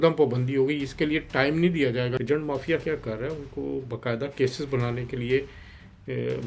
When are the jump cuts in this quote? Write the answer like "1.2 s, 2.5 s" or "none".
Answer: 2.2 s